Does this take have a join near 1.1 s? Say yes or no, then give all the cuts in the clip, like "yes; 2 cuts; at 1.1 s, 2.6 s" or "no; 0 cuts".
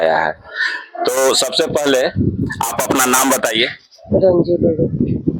no; 0 cuts